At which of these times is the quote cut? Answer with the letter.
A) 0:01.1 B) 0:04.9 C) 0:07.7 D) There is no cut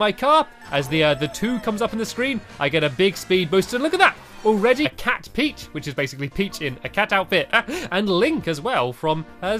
D